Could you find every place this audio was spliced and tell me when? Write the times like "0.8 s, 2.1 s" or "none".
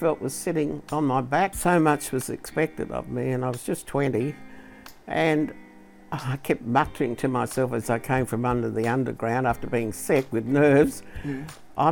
1.6 s